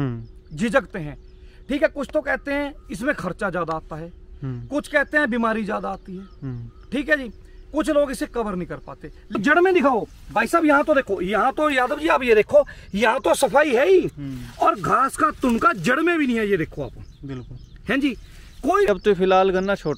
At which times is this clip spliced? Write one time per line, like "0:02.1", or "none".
0:09.4
0:18.9